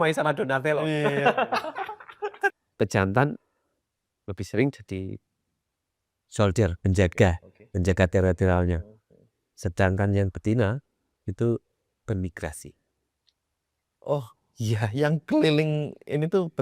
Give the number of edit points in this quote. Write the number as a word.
one